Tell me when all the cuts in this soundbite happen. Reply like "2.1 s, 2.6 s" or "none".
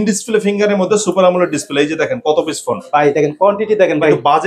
none